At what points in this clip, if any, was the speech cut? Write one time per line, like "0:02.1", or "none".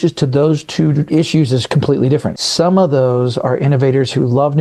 0:01.1
0:02.3